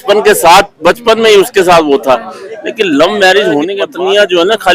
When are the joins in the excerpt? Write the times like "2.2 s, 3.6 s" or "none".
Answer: 3.8 s